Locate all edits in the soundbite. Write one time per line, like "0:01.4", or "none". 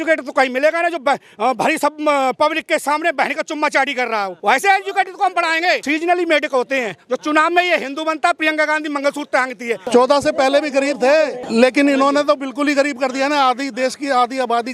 0:04.3
0:05.8
0:09.8
0:11.4